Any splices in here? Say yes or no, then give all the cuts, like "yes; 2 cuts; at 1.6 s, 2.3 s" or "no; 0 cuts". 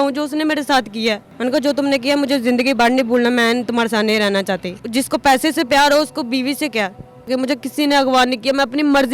yes; 3 cuts; at 1.3 s, 4.8 s, 7.3 s